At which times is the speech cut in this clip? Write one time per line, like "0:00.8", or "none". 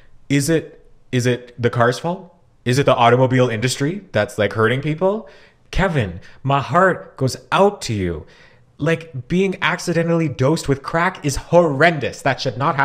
0:05.6